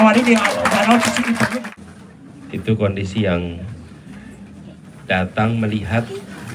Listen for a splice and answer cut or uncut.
cut